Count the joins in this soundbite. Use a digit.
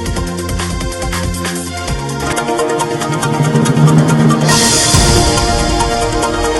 0